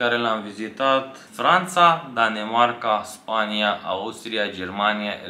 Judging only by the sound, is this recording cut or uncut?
cut